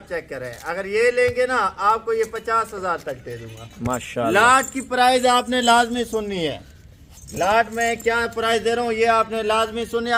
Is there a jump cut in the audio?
no; 0 cuts

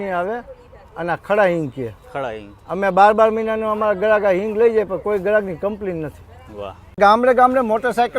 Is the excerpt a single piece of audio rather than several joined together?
no; 1 cut; at 7.0 s

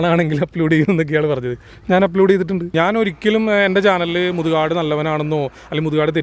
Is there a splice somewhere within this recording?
yes; 1 cut; at 2.7 s

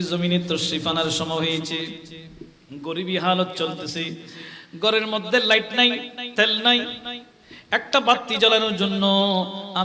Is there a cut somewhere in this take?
no; 0 cuts

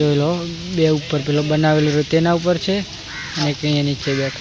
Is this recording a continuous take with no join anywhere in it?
yes; 0 cuts

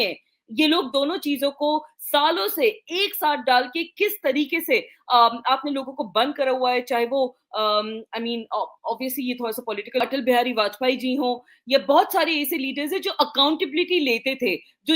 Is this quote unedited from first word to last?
no; 1 cut; at 10.0 s

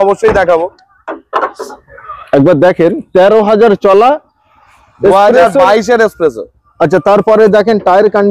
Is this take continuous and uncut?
yes; 0 cuts

